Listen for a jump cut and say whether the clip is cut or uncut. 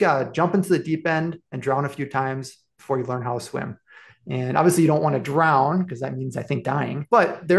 cut